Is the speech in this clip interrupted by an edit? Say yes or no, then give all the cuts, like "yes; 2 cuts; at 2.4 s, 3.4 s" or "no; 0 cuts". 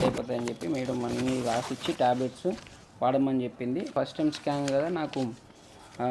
yes; 1 cut; at 3.9 s